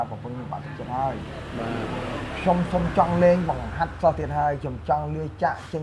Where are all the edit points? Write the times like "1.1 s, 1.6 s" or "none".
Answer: none